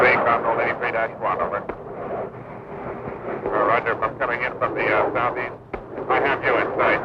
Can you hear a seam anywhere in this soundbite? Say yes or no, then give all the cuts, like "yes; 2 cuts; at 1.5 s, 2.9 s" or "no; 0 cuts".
no; 0 cuts